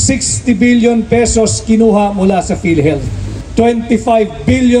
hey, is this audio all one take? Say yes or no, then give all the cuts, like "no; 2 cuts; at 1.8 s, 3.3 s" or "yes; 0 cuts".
no; 1 cut; at 3.3 s